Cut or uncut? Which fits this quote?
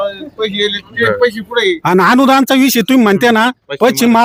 uncut